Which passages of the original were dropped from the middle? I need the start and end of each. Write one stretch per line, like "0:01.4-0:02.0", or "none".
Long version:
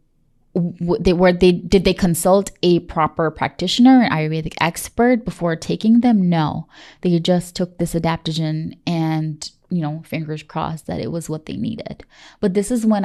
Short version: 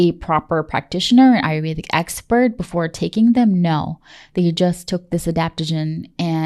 none